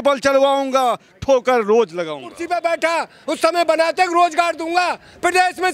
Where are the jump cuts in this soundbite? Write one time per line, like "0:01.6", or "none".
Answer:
0:02.4